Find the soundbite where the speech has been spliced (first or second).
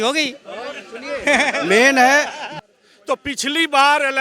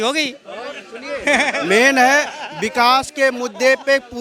first